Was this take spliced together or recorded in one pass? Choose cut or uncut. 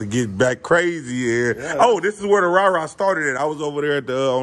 uncut